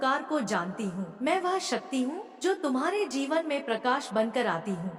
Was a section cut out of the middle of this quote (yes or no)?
yes